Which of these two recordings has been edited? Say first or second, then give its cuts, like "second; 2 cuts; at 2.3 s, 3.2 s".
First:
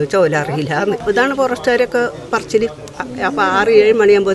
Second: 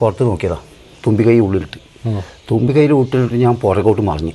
first; 2 cuts; at 1.0 s, 2.9 s